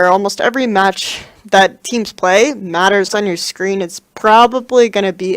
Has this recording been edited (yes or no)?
no